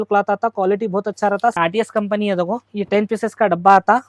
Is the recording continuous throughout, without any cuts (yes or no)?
no